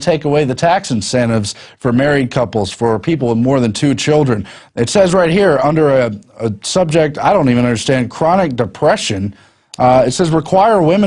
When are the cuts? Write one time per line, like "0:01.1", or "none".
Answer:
0:01.3